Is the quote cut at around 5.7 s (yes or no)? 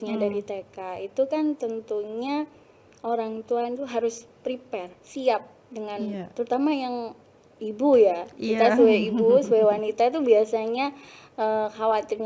no